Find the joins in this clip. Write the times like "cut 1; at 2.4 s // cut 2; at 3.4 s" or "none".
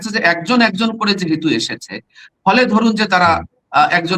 none